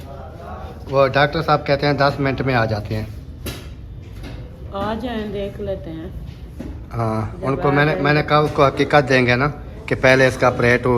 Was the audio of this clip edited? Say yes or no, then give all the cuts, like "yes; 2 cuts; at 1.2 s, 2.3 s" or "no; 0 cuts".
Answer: no; 0 cuts